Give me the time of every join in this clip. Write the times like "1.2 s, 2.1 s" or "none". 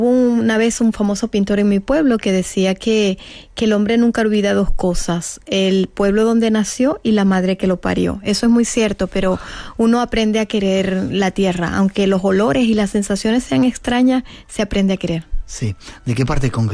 2.5 s